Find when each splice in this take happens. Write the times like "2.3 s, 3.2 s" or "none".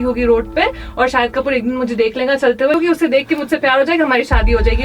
2.8 s